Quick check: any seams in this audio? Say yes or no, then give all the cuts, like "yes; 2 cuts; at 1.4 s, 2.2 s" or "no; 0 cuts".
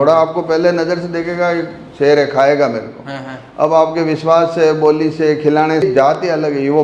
yes; 1 cut; at 5.8 s